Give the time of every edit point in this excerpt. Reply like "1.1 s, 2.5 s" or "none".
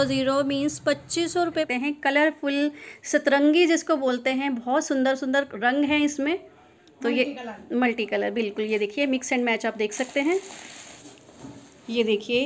1.5 s, 11.0 s